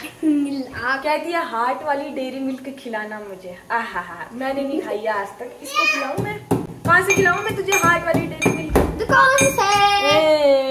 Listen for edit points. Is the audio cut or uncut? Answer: uncut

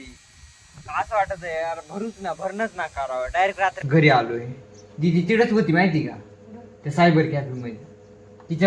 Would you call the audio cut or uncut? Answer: cut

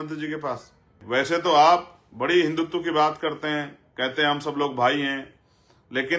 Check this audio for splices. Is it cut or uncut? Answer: cut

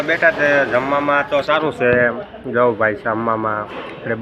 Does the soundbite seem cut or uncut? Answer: uncut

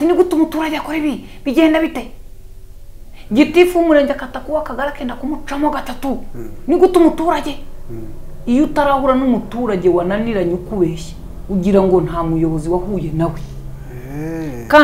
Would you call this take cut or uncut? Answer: uncut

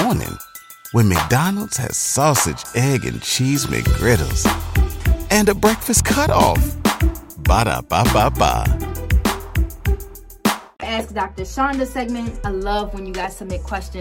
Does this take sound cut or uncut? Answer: uncut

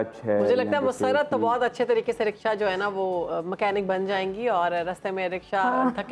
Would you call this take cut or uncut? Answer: uncut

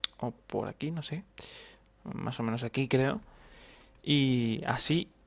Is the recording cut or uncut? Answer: uncut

